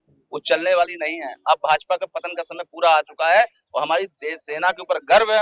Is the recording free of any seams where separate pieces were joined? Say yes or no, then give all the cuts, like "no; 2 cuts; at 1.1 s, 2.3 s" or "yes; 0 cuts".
yes; 0 cuts